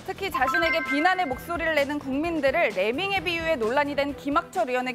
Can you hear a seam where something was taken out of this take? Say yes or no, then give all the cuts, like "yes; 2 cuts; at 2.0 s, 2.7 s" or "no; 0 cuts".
no; 0 cuts